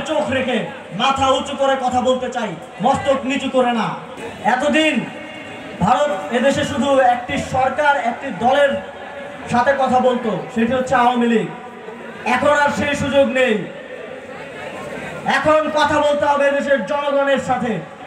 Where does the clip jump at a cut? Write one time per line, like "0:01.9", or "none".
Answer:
none